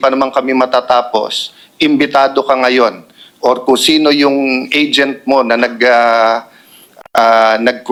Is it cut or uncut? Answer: uncut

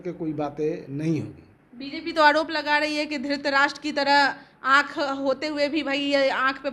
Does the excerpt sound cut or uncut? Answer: uncut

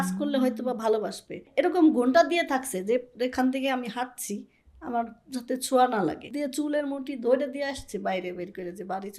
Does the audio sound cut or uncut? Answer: cut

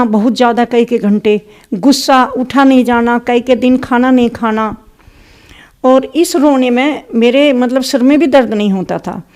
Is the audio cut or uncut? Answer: uncut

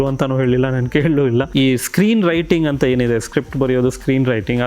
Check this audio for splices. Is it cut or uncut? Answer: cut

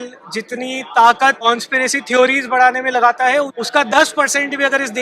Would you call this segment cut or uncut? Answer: cut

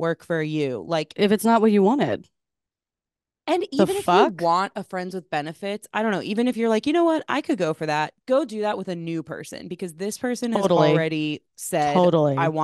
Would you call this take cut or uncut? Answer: uncut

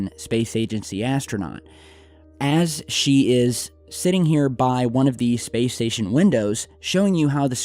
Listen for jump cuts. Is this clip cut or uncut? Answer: cut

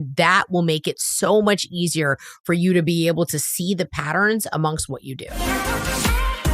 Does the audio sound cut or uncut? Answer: cut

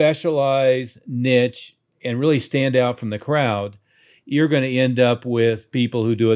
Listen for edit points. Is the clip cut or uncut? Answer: uncut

